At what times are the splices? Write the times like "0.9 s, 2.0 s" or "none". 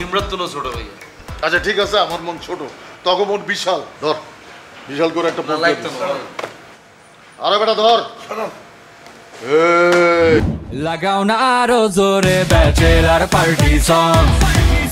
10.8 s